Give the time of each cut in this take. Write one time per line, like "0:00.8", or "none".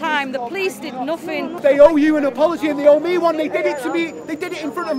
0:01.6